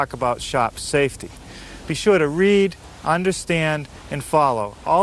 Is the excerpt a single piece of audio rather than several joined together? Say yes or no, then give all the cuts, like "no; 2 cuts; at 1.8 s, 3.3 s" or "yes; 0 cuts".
yes; 0 cuts